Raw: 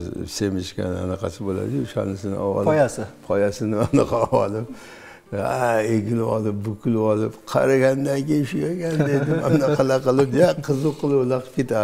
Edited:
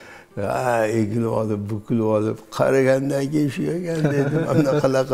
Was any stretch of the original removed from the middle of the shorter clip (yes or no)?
no